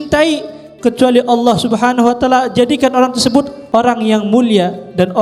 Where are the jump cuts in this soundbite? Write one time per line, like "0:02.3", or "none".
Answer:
0:03.6